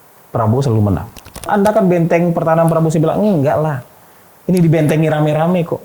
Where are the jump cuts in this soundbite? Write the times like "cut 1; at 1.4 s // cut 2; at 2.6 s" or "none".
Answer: cut 1; at 1.4 s